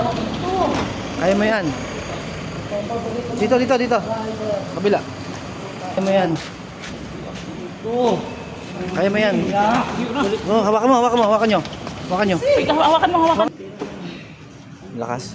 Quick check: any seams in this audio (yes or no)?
yes